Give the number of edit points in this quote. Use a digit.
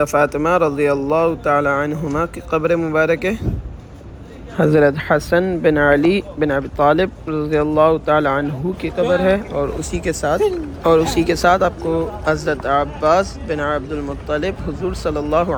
0